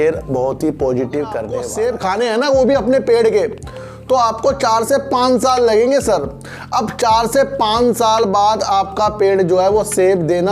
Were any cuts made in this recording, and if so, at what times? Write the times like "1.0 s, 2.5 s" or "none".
1.7 s